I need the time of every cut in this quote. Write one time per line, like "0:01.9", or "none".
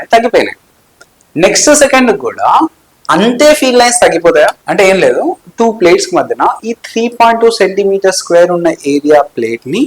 0:04.6

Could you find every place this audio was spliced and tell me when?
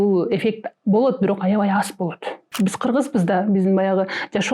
0:02.5

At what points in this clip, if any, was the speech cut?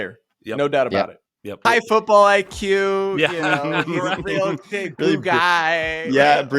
0:01.6

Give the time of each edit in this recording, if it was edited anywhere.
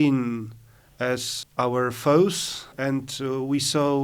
0:01.4
0:02.7

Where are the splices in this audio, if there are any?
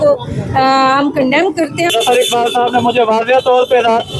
0:01.9

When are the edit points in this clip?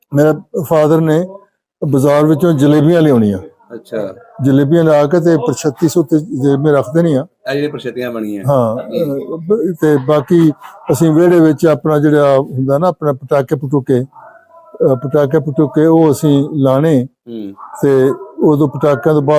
none

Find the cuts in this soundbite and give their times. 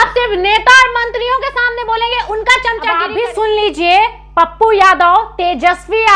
0:02.9

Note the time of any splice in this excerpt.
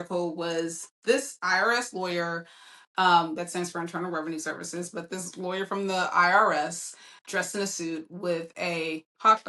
none

